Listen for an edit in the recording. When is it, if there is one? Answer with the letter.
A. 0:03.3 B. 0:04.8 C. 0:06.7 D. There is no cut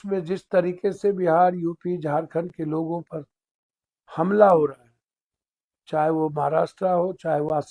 D